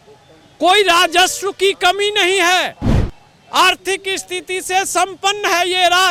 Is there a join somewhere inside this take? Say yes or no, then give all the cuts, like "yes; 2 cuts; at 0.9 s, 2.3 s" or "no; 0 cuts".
no; 0 cuts